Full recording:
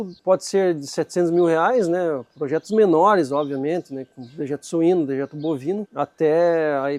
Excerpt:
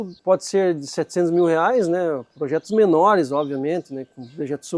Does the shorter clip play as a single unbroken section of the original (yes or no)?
yes